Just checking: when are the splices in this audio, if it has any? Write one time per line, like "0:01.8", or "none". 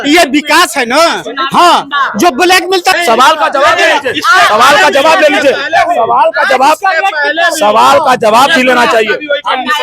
0:02.8